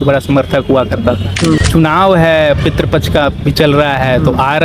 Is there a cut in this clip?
yes; 1 cut; at 1.6 s

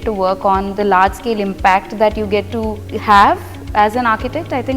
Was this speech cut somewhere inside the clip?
yes; 1 cut; at 2.9 s

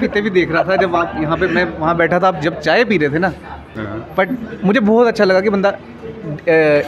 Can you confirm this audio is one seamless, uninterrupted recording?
no; 1 cut; at 3.7 s

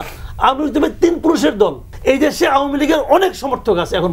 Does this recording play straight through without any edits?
no; 1 cut; at 1.9 s

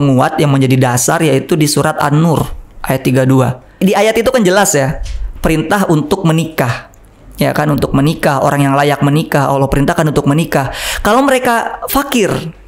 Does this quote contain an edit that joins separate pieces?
yes; 1 cut; at 3.8 s

